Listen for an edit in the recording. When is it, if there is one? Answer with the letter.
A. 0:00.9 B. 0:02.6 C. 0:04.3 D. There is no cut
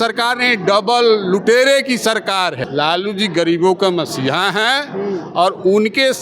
B